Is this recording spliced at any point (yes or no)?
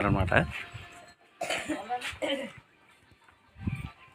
no